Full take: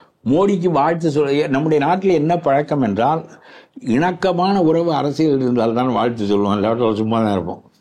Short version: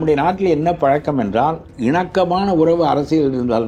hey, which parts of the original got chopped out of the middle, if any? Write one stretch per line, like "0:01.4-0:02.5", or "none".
0:03.3-0:03.7